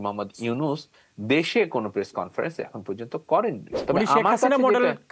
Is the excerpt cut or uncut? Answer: cut